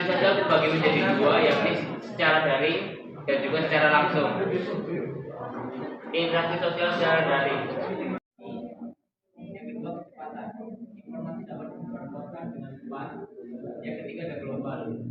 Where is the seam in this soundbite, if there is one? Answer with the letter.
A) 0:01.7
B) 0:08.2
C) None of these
B